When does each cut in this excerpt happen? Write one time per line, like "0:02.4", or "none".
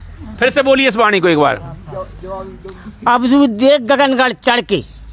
none